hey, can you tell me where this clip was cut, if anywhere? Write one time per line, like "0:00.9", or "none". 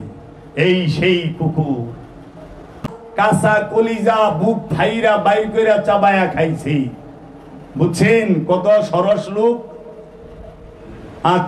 0:02.9